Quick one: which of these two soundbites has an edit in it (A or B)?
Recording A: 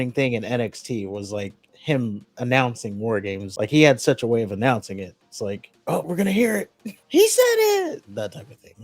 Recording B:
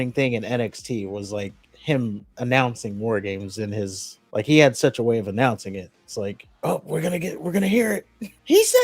A